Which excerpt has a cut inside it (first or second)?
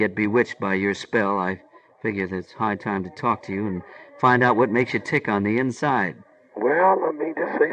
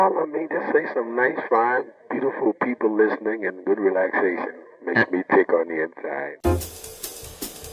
second